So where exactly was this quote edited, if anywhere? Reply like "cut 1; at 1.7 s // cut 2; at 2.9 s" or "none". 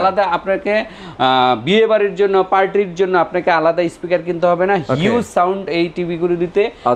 none